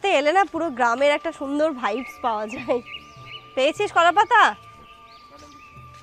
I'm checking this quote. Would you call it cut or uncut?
uncut